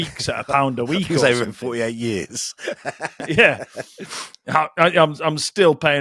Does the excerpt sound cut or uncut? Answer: uncut